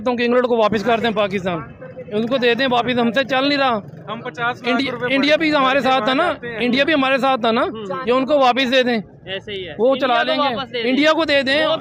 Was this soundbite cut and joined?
no; 0 cuts

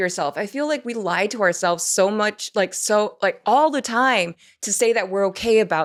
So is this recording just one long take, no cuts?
yes; 0 cuts

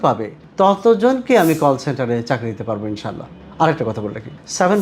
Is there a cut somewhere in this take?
no; 0 cuts

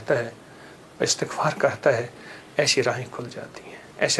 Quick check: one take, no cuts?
yes; 0 cuts

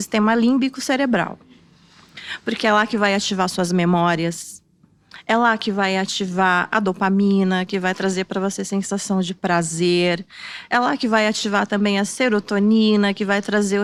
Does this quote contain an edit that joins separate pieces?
no; 0 cuts

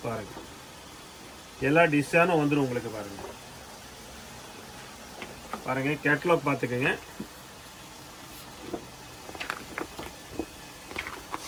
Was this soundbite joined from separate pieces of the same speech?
no; 0 cuts

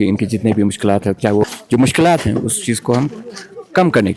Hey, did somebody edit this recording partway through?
yes; 1 cut; at 1.5 s

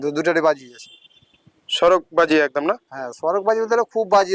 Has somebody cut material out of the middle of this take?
no; 0 cuts

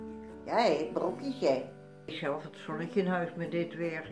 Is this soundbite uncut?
no; 1 cut; at 2.2 s

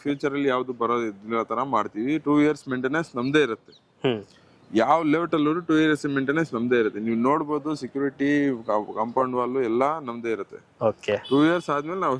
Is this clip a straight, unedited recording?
yes; 0 cuts

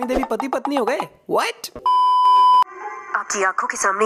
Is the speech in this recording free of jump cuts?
yes; 0 cuts

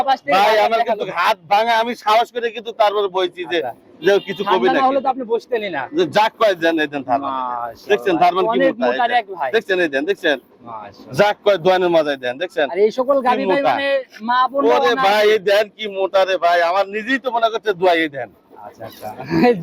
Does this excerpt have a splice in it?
no; 0 cuts

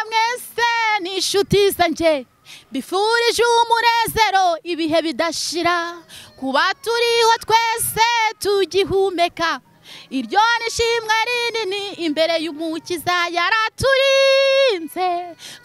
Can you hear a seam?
no; 0 cuts

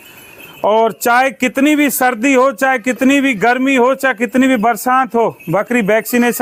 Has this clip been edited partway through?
no; 0 cuts

